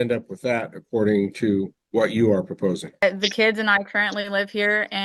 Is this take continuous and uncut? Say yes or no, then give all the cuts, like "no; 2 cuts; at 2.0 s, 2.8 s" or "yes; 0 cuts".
no; 1 cut; at 3.0 s